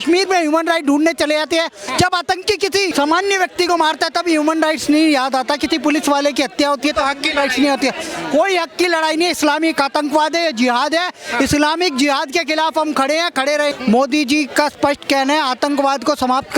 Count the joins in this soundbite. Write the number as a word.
two